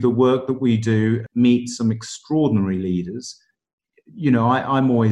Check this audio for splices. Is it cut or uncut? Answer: cut